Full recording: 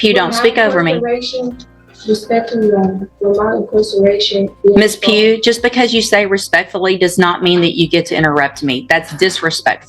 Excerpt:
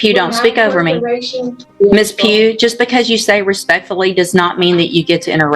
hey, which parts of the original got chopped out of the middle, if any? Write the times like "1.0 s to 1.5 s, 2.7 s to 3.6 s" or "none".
1.7 s to 4.5 s